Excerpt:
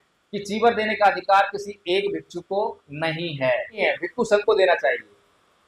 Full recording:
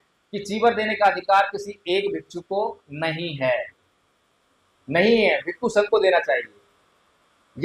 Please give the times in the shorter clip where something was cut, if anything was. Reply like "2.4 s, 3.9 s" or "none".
3.8 s